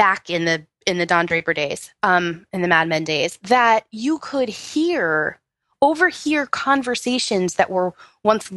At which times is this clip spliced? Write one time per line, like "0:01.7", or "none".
none